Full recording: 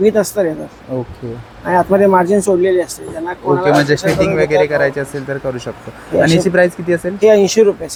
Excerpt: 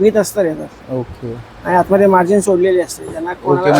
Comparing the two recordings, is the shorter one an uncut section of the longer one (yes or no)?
yes